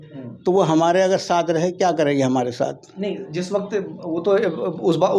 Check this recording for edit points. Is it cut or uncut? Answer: uncut